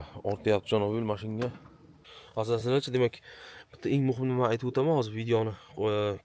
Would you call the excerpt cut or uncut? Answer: cut